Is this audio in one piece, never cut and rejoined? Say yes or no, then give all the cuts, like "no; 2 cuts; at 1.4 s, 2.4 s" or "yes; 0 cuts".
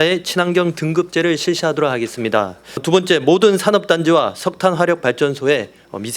no; 1 cut; at 2.8 s